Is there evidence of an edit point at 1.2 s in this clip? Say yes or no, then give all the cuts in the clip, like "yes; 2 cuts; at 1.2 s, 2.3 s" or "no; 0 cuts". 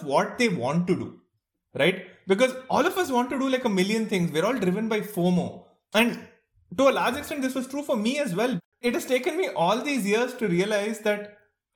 no; 1 cut; at 8.6 s